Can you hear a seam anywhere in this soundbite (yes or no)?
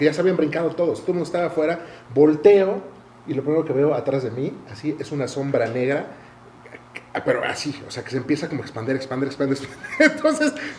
no